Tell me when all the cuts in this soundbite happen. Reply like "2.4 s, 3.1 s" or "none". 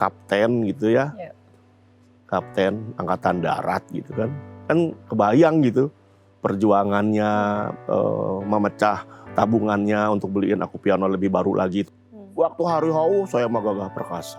11.8 s